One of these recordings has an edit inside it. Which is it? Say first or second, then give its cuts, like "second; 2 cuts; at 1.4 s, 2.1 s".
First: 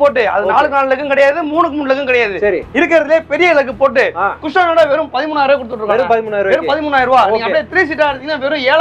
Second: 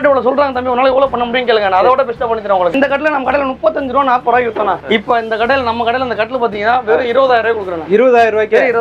second; 2 cuts; at 2.7 s, 4.8 s